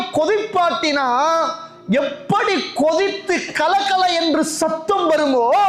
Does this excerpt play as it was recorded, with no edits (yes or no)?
yes